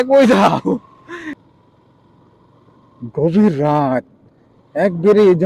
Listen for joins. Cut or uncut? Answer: cut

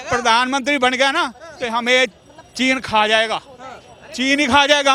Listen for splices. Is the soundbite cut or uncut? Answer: uncut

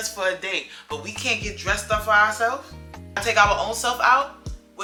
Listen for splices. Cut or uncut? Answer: uncut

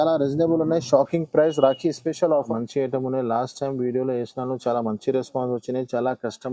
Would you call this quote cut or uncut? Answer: cut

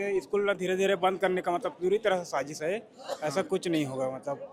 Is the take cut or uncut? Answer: uncut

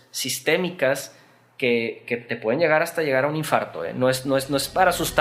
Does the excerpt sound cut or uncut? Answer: uncut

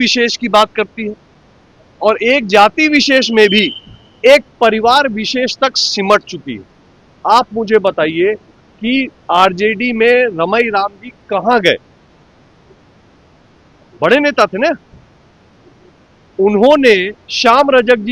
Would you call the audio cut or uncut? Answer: uncut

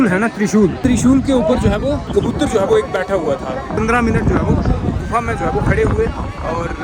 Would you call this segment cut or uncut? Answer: cut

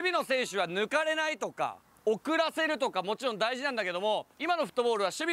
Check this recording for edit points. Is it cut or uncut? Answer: cut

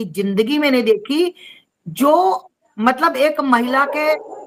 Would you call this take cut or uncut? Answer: uncut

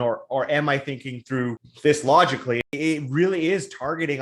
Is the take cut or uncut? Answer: cut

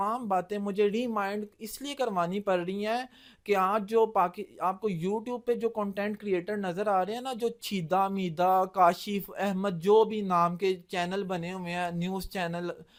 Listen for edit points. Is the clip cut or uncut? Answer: uncut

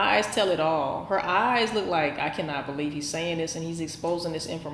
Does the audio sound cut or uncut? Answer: uncut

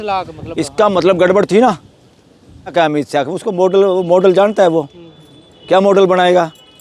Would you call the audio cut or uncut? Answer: cut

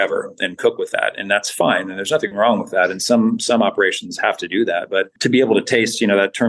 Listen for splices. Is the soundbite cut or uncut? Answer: cut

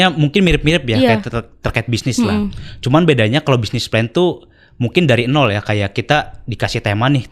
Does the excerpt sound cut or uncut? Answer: uncut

